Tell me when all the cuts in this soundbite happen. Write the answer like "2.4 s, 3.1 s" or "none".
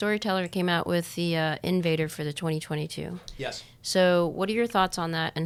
none